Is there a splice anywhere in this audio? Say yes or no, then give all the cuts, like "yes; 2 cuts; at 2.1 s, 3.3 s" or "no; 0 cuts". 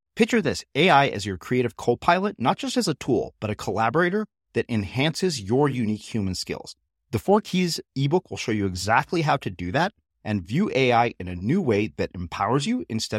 no; 0 cuts